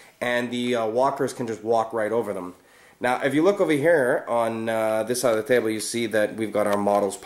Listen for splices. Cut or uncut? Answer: uncut